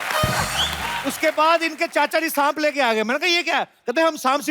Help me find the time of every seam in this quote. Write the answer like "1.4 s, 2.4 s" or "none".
1.0 s